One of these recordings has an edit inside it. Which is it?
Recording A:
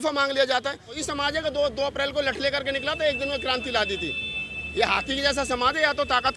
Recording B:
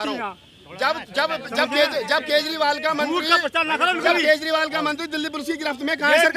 A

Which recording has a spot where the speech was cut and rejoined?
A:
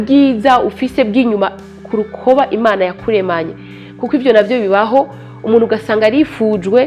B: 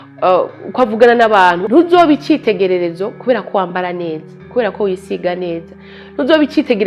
B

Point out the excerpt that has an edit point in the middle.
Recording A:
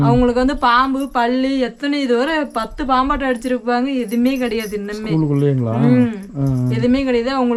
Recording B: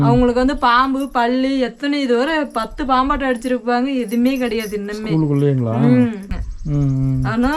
B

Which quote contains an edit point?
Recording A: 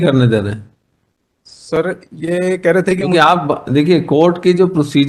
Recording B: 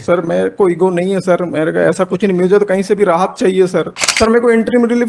B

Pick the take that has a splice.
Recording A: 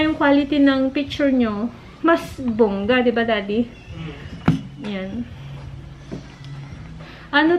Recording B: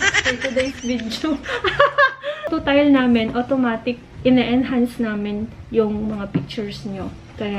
B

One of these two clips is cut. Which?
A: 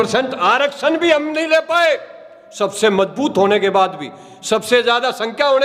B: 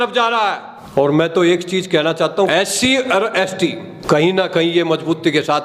B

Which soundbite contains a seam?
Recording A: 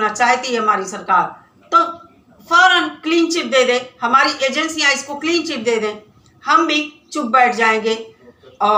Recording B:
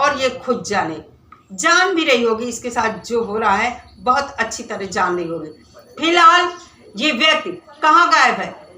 B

